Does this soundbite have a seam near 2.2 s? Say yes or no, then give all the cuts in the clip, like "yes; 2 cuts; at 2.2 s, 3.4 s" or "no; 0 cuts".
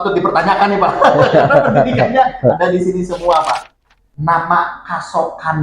no; 1 cut; at 3.7 s